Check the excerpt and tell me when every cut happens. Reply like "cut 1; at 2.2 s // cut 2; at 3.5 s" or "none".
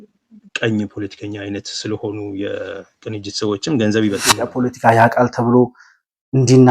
cut 1; at 4.4 s